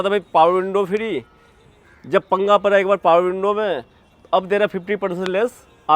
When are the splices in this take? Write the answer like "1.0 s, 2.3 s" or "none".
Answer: none